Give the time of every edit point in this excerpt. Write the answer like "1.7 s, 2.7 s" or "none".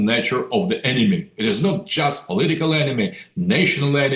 none

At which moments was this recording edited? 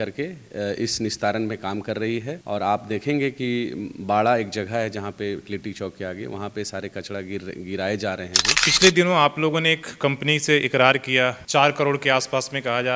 2.4 s, 8.7 s

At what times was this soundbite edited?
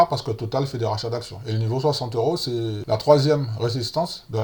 2.8 s

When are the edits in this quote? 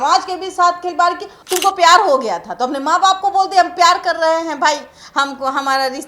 1.3 s

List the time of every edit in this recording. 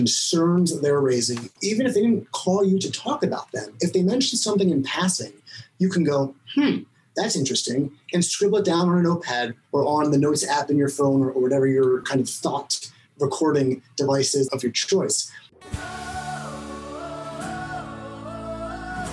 15.5 s

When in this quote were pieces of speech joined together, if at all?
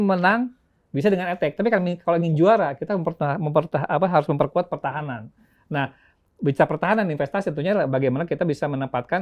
none

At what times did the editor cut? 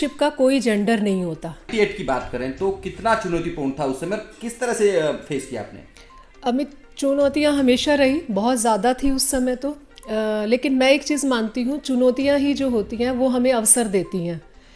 none

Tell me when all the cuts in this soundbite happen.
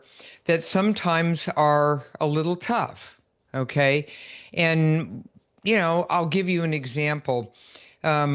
none

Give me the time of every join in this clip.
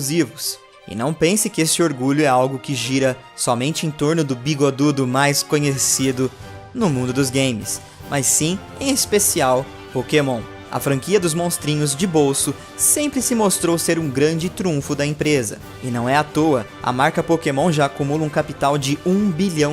none

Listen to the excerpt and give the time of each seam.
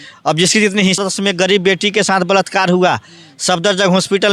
1.0 s

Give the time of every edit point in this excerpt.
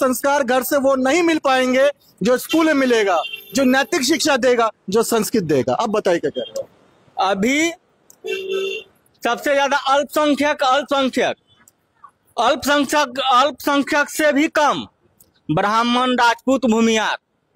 none

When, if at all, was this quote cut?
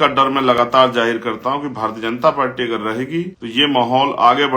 3.4 s

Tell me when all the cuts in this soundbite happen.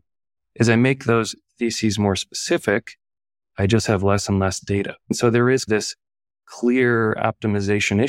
5.1 s

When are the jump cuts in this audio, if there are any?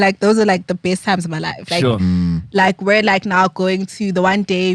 none

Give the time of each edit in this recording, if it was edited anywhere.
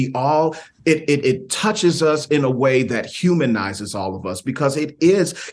none

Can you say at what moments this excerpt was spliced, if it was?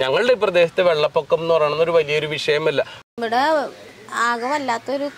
3.0 s

